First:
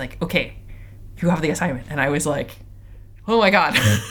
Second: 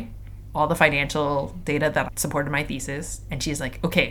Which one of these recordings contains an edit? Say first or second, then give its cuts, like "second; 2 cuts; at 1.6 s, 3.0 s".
second; 1 cut; at 2.1 s